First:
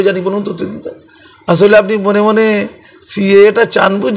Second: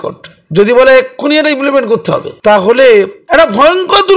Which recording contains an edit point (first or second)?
second